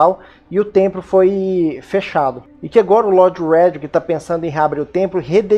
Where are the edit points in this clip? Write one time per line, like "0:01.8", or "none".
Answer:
0:04.5